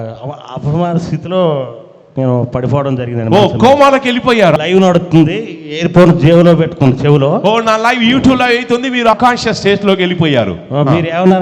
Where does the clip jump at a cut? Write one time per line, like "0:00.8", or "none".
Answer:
0:04.6
0:09.1